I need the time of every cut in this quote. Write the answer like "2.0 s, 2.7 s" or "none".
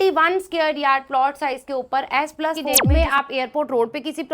2.8 s